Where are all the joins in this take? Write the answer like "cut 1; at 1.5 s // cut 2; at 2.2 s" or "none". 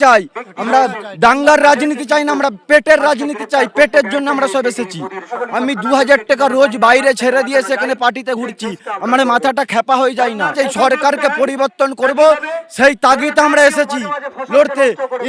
cut 1; at 5.3 s // cut 2; at 10.5 s